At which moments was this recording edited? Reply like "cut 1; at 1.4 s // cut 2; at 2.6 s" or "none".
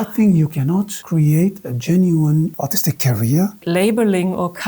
cut 1; at 1.0 s // cut 2; at 2.5 s // cut 3; at 3.6 s